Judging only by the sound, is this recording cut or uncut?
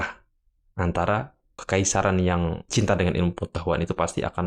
cut